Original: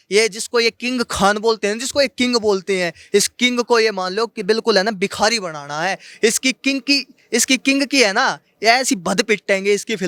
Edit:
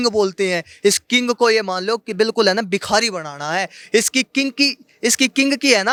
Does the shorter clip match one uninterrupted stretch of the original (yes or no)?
yes